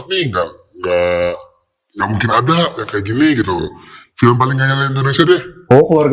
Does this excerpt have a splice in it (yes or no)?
no